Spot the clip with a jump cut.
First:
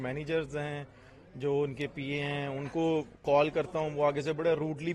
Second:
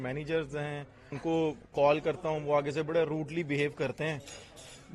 second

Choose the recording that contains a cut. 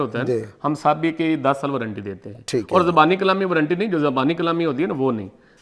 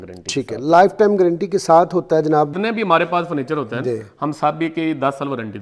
second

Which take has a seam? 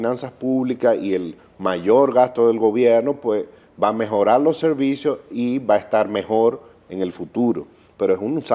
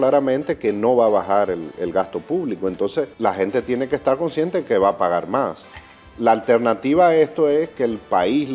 second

